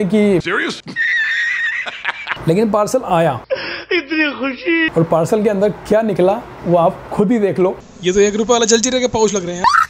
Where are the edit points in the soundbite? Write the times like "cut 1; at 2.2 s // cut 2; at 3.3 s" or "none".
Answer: cut 1; at 2.3 s // cut 2; at 4.9 s // cut 3; at 7.8 s